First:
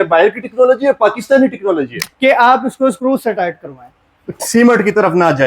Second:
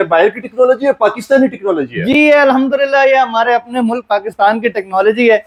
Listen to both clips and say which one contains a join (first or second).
first